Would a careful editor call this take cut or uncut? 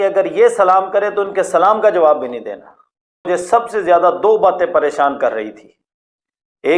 cut